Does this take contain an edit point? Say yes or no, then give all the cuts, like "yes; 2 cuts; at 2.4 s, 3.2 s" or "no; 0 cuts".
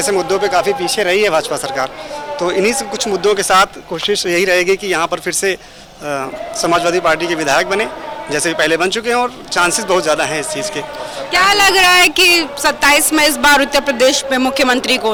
no; 0 cuts